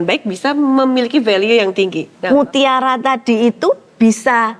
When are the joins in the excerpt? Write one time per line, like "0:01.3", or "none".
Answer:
0:02.1